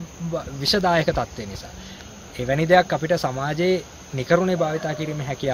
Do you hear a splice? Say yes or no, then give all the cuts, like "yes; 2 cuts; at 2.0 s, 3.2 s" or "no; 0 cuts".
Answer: no; 0 cuts